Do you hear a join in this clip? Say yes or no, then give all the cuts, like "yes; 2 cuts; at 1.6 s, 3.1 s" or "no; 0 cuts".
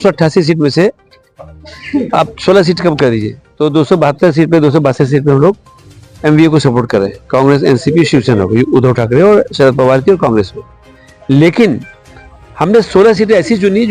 no; 0 cuts